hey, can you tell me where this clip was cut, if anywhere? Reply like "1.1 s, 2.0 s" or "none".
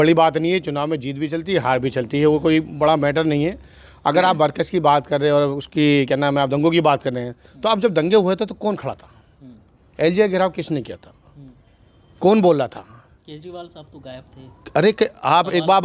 none